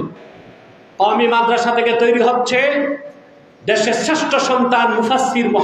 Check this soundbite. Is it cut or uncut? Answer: uncut